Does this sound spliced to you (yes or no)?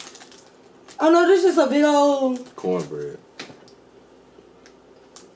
no